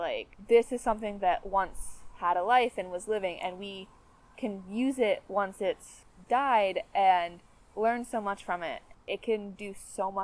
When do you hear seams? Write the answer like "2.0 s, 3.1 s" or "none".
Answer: 8.9 s